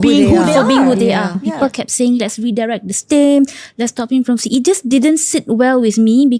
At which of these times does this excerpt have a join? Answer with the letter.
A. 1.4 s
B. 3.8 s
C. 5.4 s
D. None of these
A